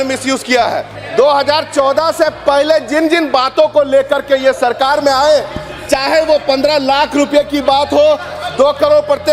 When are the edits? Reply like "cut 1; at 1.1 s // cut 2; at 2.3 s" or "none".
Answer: cut 1; at 1.0 s